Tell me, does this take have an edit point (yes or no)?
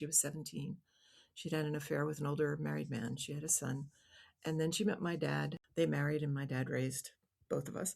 yes